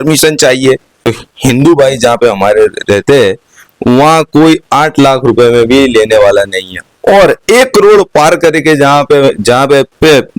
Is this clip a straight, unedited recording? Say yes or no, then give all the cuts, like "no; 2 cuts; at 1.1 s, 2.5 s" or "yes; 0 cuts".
no; 1 cut; at 1.1 s